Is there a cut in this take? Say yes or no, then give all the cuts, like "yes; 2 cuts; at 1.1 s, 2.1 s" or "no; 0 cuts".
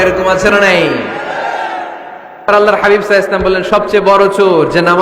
yes; 1 cut; at 2.5 s